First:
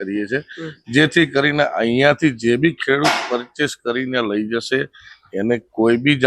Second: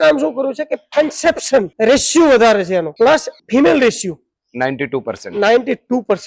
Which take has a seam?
second; 2 cuts; at 1.7 s, 3.2 s

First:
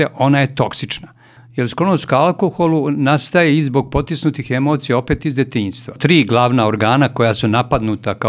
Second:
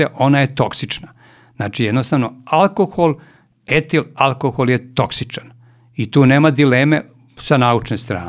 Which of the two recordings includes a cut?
first; 2 cuts; at 1.4 s, 6.0 s

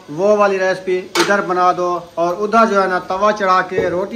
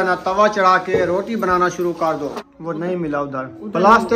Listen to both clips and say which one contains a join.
second; 1 cut; at 2.3 s

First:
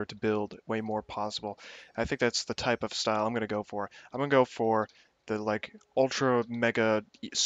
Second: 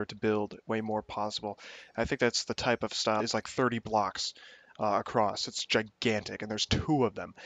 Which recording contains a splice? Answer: first; 1 cut; at 3.2 s

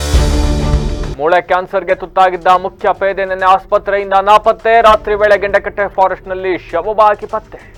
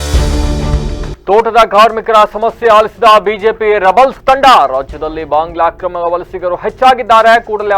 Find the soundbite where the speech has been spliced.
second; 1 cut; at 1.1 s

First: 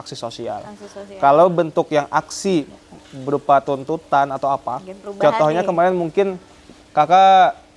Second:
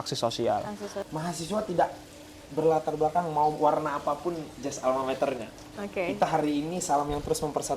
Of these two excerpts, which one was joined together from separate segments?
second; 1 cut; at 1.0 s

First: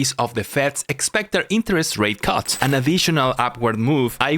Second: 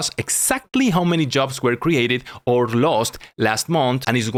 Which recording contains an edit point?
first; 1 cut; at 2.6 s

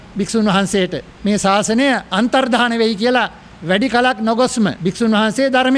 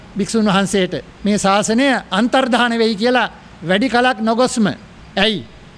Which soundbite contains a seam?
first; 1 cut; at 4.8 s

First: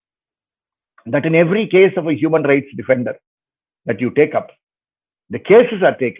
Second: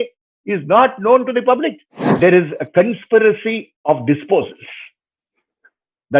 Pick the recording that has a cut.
second; 1 cut; at 2.2 s

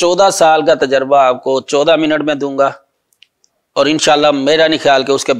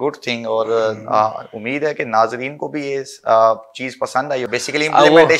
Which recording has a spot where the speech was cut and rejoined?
second; 1 cut; at 4.5 s

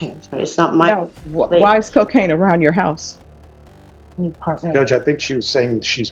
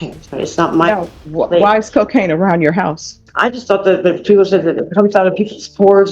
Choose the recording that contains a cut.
second; 1 cut; at 3.3 s

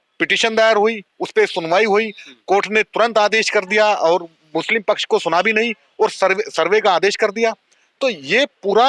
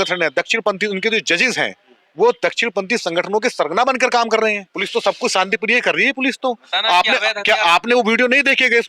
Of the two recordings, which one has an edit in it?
second; 1 cut; at 4.7 s

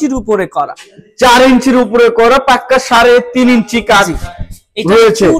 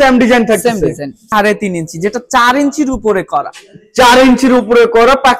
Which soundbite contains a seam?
second; 1 cut; at 1.2 s

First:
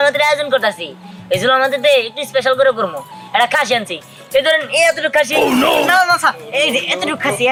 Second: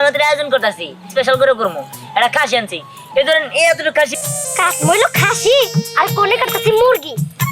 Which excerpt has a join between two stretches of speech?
second; 2 cuts; at 1.0 s, 4.1 s

